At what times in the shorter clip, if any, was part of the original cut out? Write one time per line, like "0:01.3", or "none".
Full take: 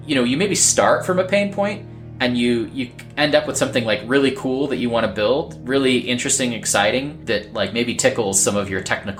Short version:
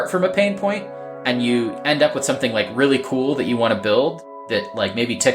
0:01.8
0:04.3